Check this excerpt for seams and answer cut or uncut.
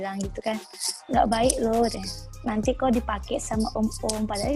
uncut